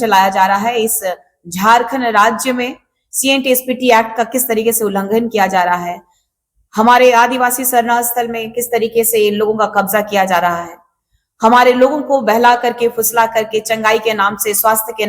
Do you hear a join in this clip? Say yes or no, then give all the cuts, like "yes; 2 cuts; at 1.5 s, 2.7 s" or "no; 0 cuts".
no; 0 cuts